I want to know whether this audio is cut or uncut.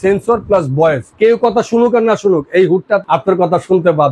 cut